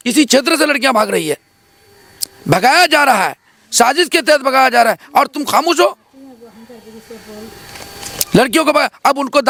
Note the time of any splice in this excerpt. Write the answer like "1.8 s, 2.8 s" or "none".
none